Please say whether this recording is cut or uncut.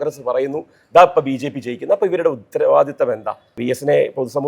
cut